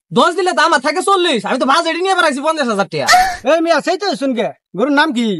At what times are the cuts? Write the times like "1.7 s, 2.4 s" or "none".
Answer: 3.3 s